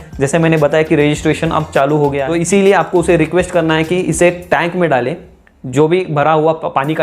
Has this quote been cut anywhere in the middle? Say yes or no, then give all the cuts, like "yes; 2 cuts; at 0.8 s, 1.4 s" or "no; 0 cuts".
yes; 1 cut; at 2.2 s